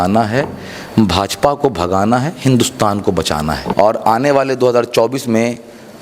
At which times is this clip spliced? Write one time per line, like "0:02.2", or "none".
0:03.6